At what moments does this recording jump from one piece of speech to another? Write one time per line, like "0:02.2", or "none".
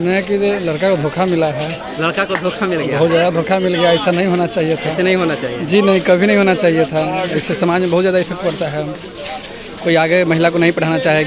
none